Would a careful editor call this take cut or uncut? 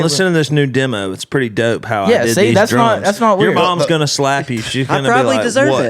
uncut